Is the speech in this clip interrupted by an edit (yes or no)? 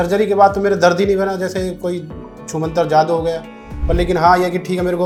no